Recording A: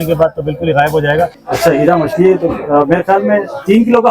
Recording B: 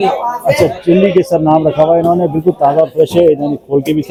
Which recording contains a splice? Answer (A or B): A